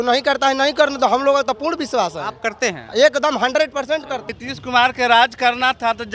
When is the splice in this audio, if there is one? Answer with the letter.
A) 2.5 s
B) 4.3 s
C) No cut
B